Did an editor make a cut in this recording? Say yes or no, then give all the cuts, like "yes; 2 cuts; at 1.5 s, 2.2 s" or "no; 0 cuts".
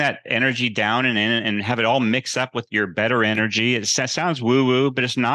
no; 0 cuts